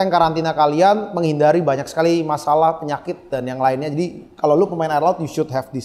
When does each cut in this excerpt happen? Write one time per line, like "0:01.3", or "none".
none